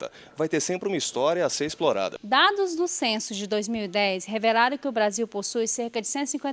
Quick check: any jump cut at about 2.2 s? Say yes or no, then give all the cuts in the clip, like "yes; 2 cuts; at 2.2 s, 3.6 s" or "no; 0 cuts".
yes; 1 cut; at 2.2 s